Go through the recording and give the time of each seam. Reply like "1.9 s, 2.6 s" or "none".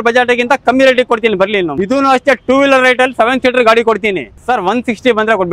1.7 s, 4.3 s